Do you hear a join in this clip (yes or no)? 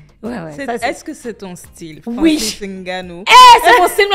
no